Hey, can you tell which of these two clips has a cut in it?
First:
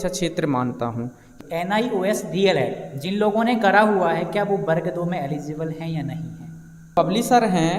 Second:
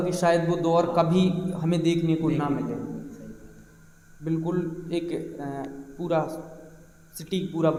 first; 2 cuts; at 1.2 s, 6.9 s

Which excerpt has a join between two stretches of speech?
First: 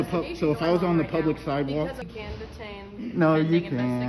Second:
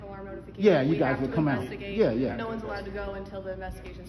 first; 1 cut; at 2.1 s

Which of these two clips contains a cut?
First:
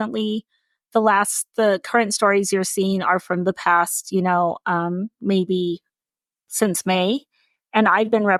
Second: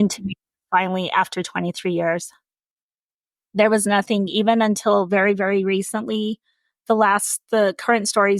second; 1 cut; at 3.1 s

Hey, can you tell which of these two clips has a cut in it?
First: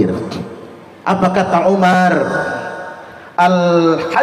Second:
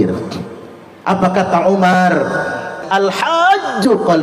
second; 1 cut; at 2.8 s

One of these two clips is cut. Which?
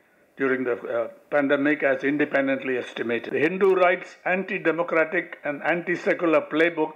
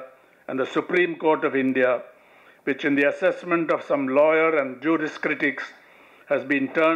first; 1 cut; at 3.2 s

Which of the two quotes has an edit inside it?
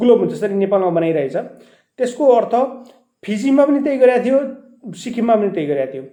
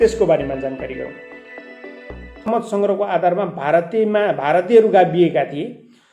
second; 1 cut; at 2.5 s

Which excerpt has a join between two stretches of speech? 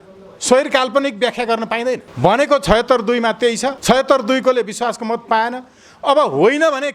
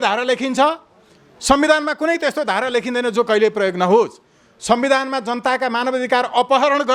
first; 2 cuts; at 2.1 s, 3.8 s

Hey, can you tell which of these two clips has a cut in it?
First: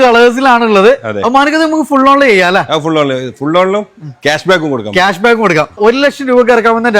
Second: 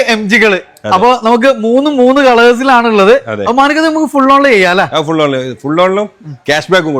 first; 1 cut; at 5.8 s

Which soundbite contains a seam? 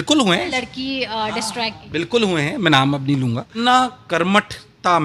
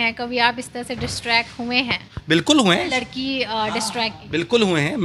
first; 1 cut; at 3.6 s

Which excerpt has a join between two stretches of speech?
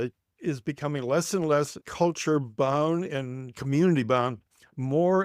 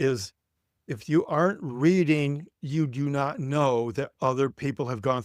first; 1 cut; at 1.8 s

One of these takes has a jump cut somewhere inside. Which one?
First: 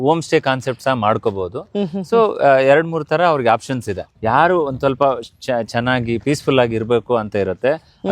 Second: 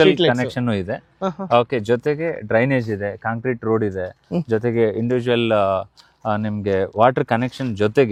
first; 1 cut; at 4.1 s

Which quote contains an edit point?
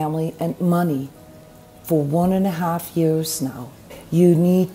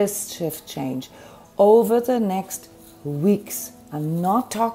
first; 1 cut; at 3.8 s

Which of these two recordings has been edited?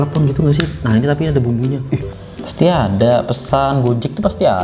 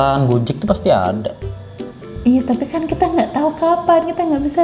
first; 1 cut; at 2.1 s

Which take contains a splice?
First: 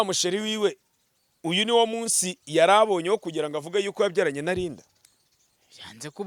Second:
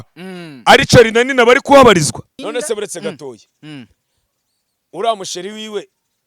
second; 1 cut; at 2.3 s

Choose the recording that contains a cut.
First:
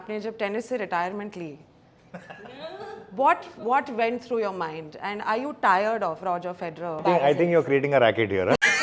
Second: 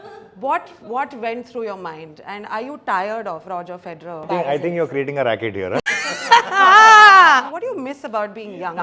second; 1 cut; at 7.6 s

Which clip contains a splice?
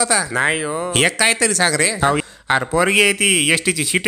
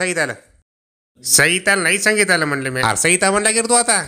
first; 1 cut; at 2.2 s

